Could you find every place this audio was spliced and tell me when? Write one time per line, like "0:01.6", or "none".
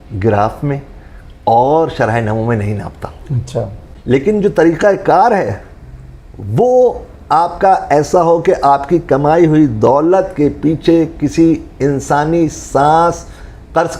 0:03.9